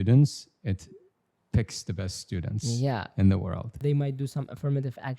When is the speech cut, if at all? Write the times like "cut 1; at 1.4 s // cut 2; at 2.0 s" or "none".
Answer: cut 1; at 3.8 s